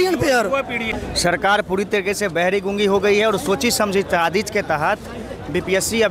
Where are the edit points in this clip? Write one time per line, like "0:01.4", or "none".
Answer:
0:01.0